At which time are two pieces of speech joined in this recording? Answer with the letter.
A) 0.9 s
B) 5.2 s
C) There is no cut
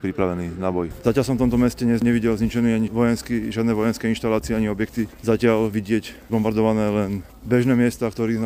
A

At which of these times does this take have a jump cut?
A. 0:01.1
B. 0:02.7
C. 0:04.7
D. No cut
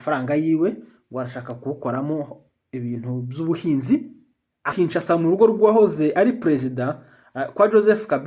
C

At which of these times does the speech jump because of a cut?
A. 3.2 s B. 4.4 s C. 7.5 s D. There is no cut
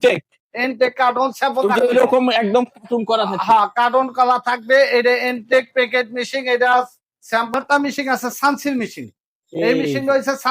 C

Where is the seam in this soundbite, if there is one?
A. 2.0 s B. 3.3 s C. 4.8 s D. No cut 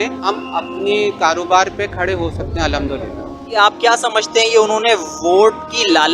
B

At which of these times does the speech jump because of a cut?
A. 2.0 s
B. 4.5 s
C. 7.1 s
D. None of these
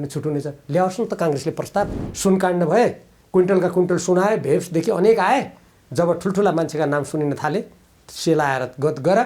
A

